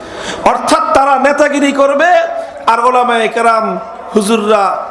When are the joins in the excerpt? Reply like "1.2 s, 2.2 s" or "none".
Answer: none